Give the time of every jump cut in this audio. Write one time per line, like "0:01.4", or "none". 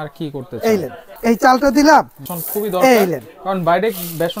0:01.0
0:02.2